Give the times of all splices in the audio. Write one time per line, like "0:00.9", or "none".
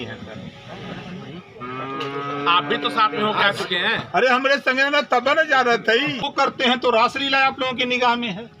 0:06.3